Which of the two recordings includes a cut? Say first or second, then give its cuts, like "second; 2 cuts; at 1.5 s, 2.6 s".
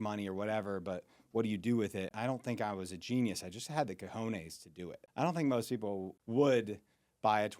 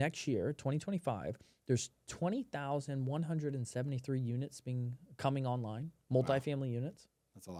first; 3 cuts; at 2.1 s, 5.0 s, 6.1 s